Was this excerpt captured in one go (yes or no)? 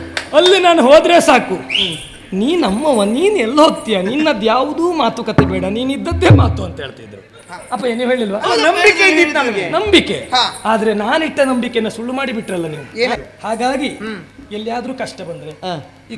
no